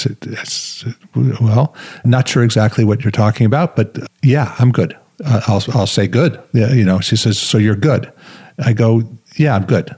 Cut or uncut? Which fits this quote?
cut